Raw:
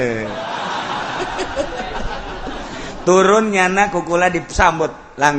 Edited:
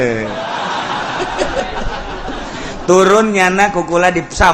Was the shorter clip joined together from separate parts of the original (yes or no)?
yes